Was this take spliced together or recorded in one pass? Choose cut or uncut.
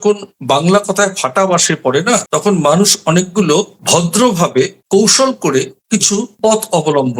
uncut